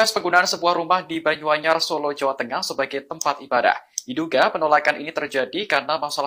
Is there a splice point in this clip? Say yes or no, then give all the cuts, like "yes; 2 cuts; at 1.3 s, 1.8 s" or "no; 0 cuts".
no; 0 cuts